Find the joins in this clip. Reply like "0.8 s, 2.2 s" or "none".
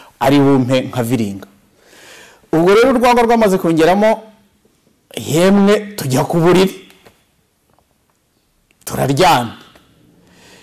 none